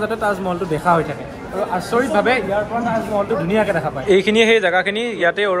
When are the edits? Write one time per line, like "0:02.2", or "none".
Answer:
0:04.0